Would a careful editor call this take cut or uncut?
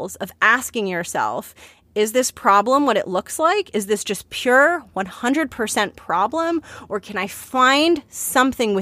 uncut